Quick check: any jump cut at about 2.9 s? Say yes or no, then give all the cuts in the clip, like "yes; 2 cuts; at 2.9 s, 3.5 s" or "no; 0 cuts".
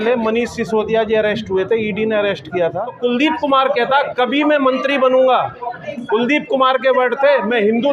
yes; 1 cut; at 2.9 s